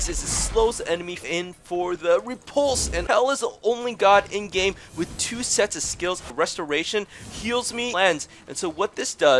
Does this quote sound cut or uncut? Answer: cut